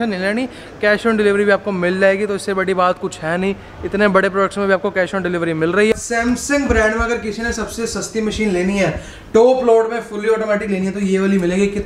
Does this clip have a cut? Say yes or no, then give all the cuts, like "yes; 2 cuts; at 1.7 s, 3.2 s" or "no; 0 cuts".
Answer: yes; 1 cut; at 5.9 s